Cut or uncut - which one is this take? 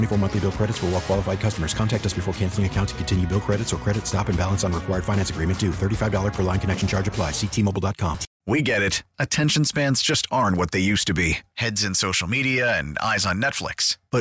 cut